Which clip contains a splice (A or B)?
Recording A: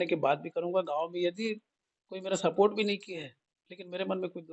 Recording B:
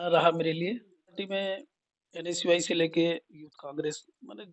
B